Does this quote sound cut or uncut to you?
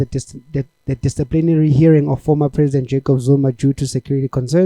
uncut